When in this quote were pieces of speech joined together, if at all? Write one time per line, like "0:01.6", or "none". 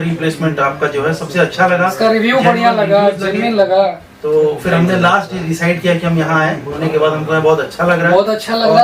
0:06.7

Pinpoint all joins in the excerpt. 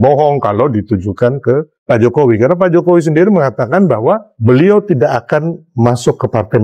0:01.7
0:04.3
0:05.6

